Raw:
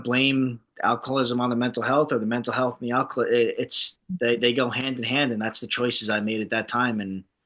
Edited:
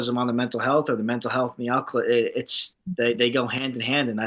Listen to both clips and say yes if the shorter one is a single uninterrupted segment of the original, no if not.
yes